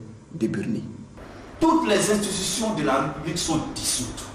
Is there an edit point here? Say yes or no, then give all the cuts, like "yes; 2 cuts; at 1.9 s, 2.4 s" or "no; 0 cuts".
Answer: yes; 1 cut; at 1.4 s